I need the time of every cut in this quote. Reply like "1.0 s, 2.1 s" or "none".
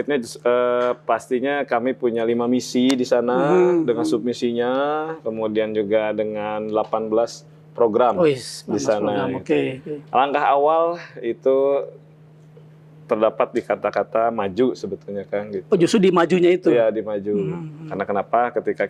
none